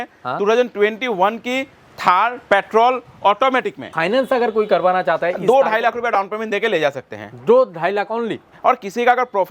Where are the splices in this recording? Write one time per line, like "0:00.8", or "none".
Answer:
0:03.9

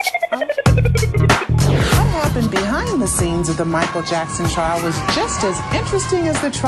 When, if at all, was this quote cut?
0:01.2

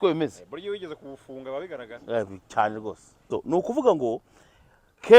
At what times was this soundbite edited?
0:03.2

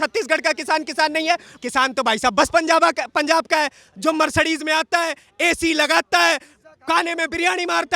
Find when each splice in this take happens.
0:01.5

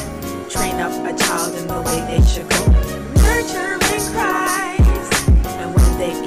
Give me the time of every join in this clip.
none

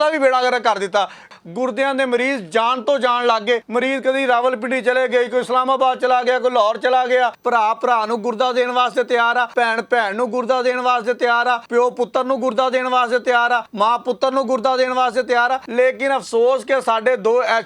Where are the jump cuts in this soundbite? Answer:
0:01.3
0:03.7
0:07.4
0:09.5
0:11.6
0:13.7
0:15.6

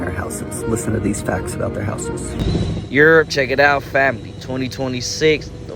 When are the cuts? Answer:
0:02.3

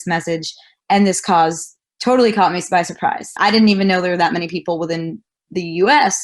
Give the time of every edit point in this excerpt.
0:03.4

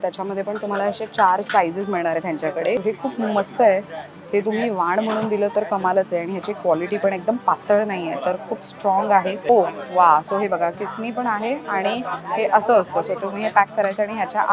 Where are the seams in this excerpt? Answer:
0:02.8
0:09.5

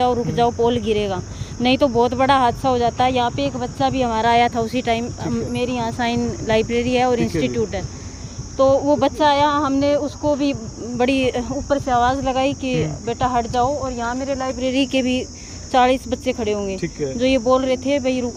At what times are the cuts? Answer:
none

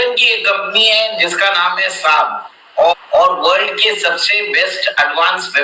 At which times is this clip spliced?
0:02.9

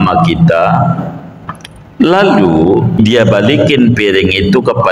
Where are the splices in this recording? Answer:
0:03.0

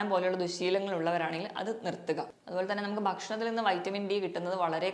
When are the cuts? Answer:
0:02.4

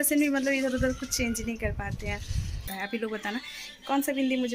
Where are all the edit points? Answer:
0:02.7

